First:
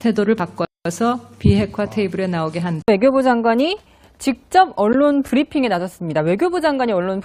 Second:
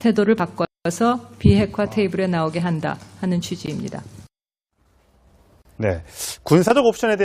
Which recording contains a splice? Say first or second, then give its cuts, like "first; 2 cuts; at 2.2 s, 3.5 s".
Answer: second; 1 cut; at 2.8 s